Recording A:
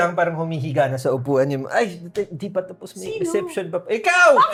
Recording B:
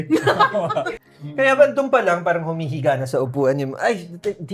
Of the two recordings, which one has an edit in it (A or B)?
B